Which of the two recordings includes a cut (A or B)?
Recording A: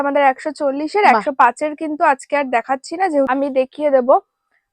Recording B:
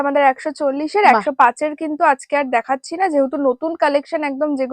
A